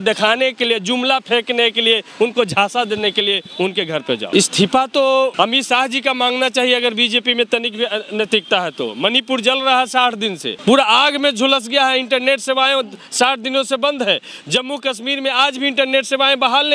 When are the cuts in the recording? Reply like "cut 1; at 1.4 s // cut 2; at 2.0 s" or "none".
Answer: cut 1; at 4.2 s // cut 2; at 5.3 s // cut 3; at 10.5 s